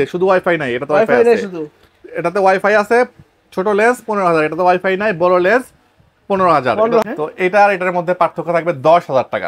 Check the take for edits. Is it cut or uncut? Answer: cut